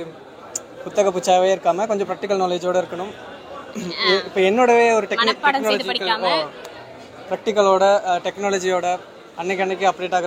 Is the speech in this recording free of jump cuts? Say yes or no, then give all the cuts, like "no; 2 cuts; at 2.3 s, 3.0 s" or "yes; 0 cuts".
yes; 0 cuts